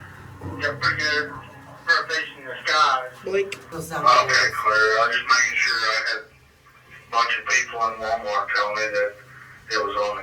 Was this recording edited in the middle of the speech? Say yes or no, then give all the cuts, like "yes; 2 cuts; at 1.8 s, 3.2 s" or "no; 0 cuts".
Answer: no; 0 cuts